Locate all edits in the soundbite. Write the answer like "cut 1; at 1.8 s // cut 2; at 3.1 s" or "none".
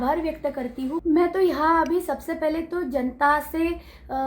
cut 1; at 1.0 s